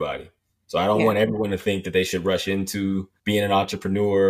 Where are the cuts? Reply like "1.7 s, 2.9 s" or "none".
3.1 s

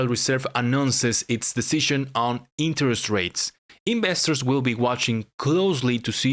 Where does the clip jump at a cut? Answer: none

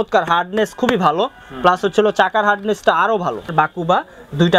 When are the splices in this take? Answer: 3.4 s

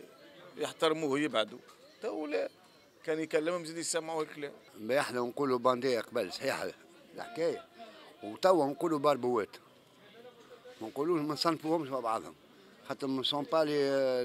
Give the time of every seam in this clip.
4.6 s

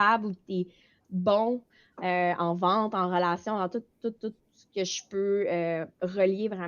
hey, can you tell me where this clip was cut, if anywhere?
1.7 s

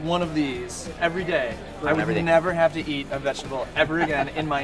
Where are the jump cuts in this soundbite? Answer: none

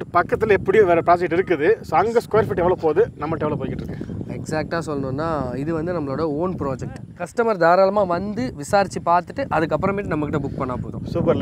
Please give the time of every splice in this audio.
7.1 s

